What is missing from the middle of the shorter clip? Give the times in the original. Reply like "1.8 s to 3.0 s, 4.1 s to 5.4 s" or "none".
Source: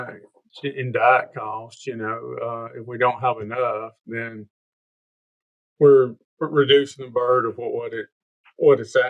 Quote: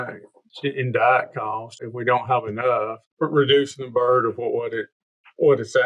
1.8 s to 2.7 s, 4.0 s to 6.2 s